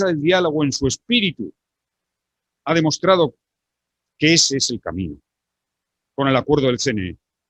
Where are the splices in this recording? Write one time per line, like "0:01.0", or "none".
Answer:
none